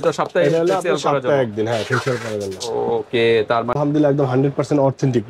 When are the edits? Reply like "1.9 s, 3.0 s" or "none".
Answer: 3.8 s